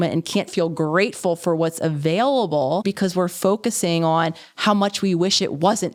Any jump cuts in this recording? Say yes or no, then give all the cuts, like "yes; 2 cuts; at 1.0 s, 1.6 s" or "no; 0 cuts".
no; 0 cuts